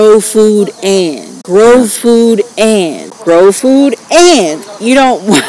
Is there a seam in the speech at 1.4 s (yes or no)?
yes